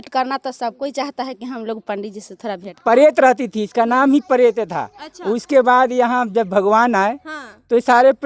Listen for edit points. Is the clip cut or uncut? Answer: cut